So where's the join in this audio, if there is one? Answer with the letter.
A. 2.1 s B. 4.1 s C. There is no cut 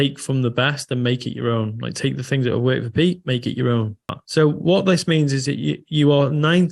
B